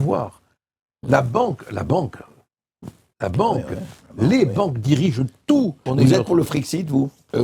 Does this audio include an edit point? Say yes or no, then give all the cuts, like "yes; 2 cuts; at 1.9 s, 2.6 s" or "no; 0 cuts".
yes; 1 cut; at 5.9 s